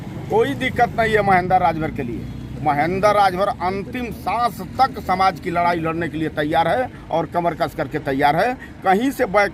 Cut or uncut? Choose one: uncut